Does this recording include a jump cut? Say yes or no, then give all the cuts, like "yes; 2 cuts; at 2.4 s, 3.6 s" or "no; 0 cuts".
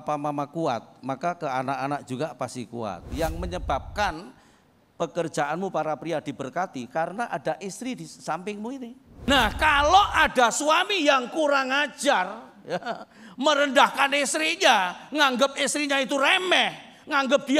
yes; 2 cuts; at 3.1 s, 9.3 s